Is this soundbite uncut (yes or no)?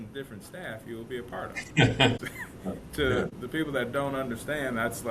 no